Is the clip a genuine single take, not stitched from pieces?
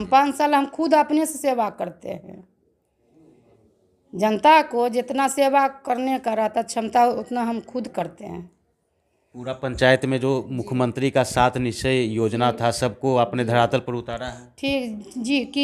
yes; 0 cuts

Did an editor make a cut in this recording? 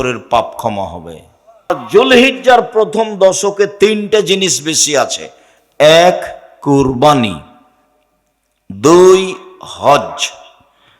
yes; 1 cut; at 1.7 s

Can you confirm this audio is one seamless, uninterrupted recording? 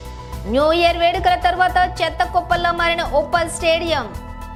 yes; 0 cuts

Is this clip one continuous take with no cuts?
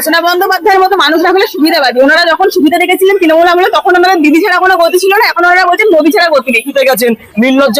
no; 1 cut; at 6.7 s

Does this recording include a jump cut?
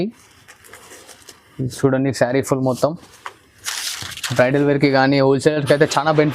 no; 0 cuts

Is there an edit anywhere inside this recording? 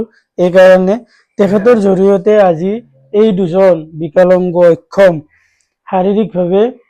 no; 0 cuts

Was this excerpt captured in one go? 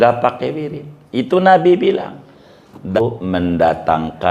no; 1 cut; at 2.9 s

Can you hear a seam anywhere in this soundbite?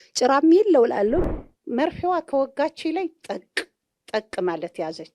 yes; 1 cut; at 1.2 s

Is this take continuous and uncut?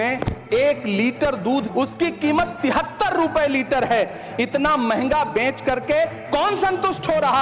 no; 1 cut; at 1.7 s

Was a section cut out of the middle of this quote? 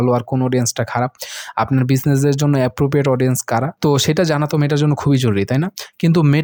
no; 0 cuts

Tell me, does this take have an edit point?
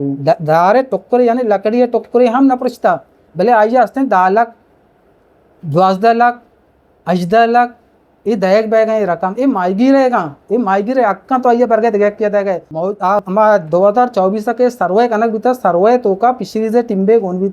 yes; 1 cut; at 12.9 s

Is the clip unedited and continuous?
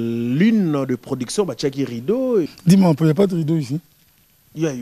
no; 1 cut; at 2.5 s

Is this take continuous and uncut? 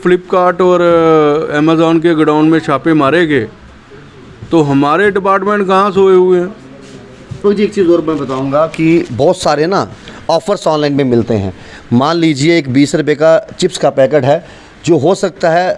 no; 1 cut; at 7.4 s

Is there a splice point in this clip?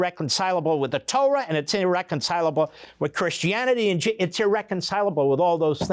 no; 0 cuts

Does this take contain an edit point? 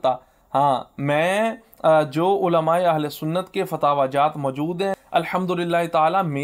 no; 0 cuts

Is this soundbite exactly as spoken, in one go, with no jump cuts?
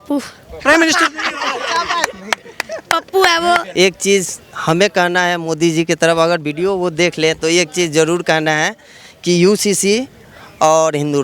no; 1 cut; at 3.7 s

